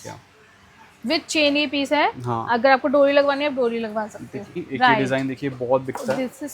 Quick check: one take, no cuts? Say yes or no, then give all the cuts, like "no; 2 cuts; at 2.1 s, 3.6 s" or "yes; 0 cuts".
no; 1 cut; at 4.6 s